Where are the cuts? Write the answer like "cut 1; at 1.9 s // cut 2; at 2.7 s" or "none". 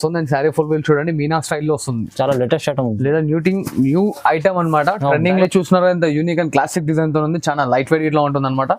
cut 1; at 5.4 s

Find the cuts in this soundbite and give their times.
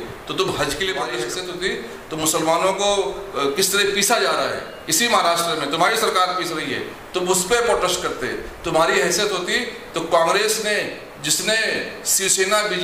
cut 1; at 1.2 s

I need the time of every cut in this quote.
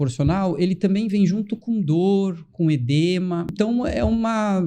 cut 1; at 3.5 s

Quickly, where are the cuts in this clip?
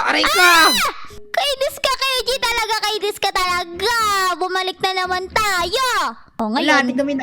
cut 1; at 6.2 s

